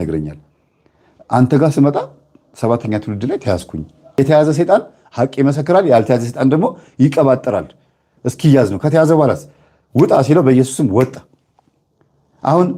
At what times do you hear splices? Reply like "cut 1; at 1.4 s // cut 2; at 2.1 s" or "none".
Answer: cut 1; at 4.2 s